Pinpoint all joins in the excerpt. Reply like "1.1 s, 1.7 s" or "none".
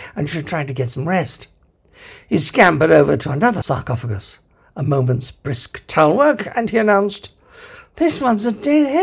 3.6 s